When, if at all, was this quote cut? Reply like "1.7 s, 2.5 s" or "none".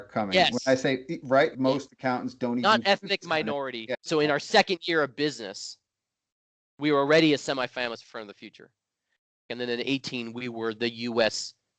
1.5 s, 4.0 s, 9.5 s